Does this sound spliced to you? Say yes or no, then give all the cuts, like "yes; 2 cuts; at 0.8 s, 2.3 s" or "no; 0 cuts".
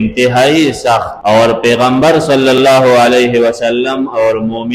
yes; 1 cut; at 1.1 s